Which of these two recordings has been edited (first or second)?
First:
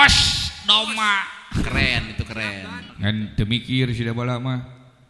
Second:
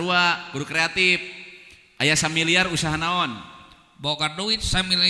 first